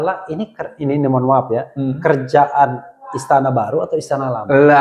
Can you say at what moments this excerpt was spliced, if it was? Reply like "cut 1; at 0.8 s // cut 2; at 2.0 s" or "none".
none